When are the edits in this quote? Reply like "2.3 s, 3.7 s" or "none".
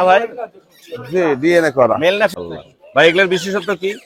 2.3 s